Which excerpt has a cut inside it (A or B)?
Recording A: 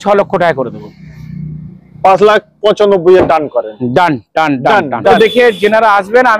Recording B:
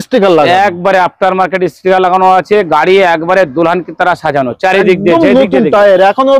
A